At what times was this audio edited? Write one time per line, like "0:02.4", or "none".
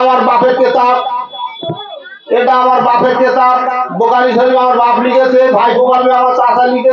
none